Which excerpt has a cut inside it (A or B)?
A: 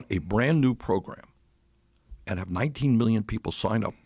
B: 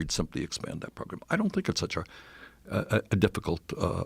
B